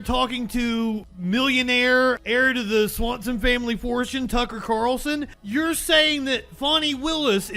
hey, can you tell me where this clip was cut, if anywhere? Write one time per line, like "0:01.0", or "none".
0:01.1
0:02.2
0:05.4